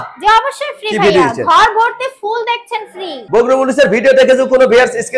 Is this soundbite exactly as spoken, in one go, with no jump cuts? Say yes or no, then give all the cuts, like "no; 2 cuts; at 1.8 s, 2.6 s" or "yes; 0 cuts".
no; 1 cut; at 3.1 s